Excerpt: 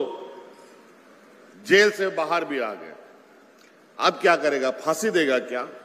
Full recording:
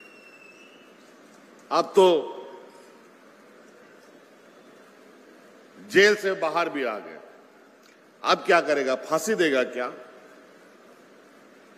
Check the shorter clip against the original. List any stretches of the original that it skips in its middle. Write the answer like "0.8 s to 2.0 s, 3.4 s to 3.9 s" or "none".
3.6 s to 5.7 s